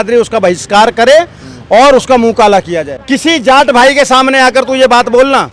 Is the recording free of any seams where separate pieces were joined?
no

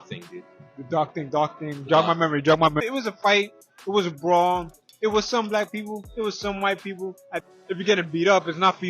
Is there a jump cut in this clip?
yes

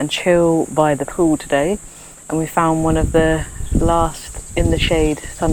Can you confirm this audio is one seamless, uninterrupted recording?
yes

